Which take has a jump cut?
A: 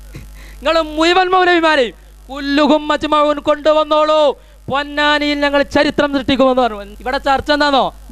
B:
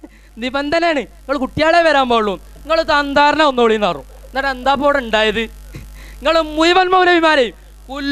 A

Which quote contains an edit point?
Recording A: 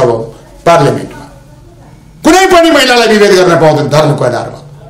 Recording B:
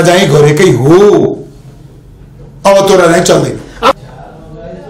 B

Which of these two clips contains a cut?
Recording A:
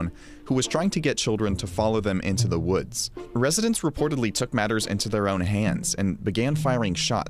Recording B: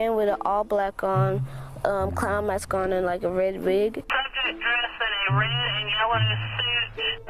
A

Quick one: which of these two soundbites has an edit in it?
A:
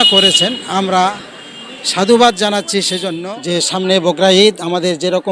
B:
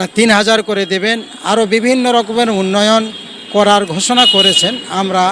A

